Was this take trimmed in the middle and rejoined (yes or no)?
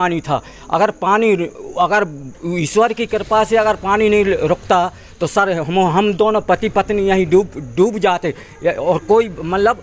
no